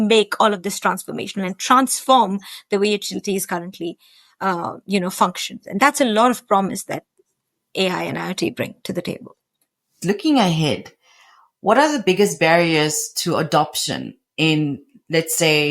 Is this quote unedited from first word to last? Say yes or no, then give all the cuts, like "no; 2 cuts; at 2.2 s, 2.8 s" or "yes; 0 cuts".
no; 1 cut; at 10.0 s